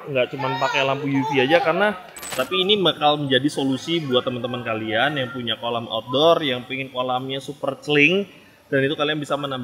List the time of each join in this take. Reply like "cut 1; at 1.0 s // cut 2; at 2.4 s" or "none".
cut 1; at 2.3 s